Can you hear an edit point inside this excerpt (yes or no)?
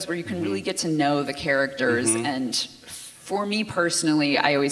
no